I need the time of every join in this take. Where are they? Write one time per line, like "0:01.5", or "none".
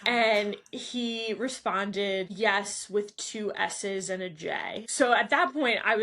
0:02.3
0:04.8